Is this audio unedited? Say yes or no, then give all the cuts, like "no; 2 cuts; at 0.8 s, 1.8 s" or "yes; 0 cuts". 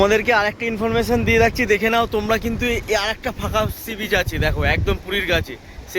yes; 0 cuts